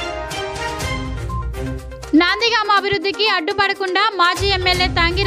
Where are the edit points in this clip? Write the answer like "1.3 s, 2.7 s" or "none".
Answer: 1.4 s